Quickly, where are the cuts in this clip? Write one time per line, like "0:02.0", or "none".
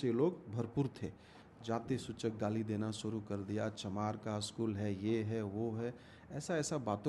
0:01.3